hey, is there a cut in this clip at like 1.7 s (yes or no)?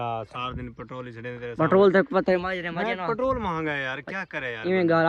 no